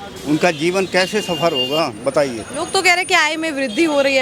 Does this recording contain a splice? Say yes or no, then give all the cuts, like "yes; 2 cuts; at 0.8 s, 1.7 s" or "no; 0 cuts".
no; 0 cuts